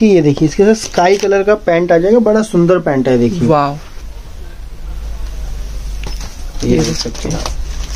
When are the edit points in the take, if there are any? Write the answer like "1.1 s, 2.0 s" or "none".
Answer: none